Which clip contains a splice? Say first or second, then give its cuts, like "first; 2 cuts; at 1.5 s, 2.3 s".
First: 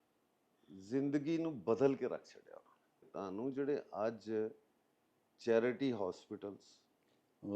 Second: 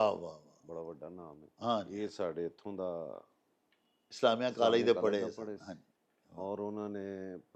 first; 1 cut; at 3.1 s